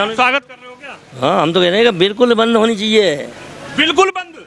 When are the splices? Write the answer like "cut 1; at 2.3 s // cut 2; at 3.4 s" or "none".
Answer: none